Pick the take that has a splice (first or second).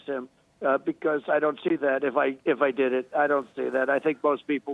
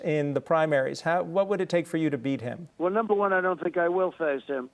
second